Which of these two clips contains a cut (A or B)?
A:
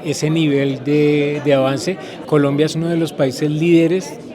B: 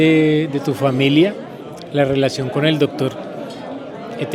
A